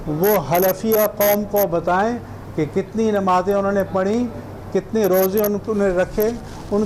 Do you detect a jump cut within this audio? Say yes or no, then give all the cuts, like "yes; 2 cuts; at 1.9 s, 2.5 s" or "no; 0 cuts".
no; 0 cuts